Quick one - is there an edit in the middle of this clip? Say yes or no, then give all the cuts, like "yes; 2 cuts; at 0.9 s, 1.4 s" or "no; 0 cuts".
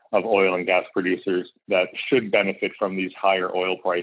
yes; 1 cut; at 1.5 s